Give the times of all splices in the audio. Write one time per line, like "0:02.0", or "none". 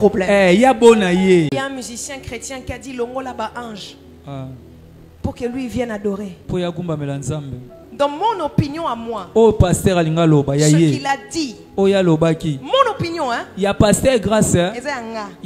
0:01.5
0:07.8